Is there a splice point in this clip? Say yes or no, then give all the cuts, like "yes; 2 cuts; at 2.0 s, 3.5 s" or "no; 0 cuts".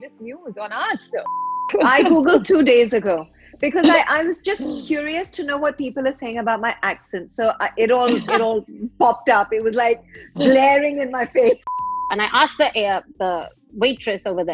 yes; 2 cuts; at 1.6 s, 11.9 s